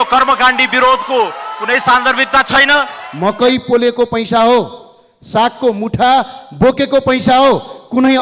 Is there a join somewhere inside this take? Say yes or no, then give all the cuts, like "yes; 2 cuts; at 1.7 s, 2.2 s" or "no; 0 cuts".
yes; 1 cut; at 3.0 s